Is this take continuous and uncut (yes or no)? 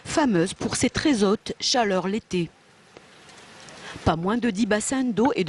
no